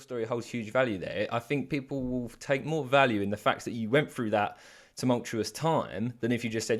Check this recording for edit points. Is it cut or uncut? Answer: uncut